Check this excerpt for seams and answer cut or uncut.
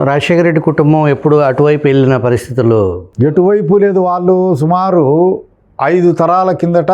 uncut